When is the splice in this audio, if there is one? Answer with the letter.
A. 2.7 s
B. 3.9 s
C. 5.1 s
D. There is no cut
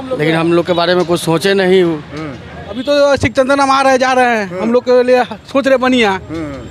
A